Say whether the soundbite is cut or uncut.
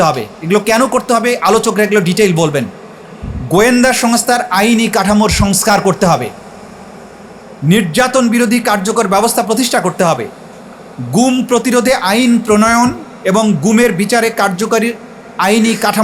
uncut